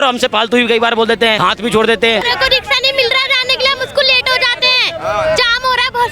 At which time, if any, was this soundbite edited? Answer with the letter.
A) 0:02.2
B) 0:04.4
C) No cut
A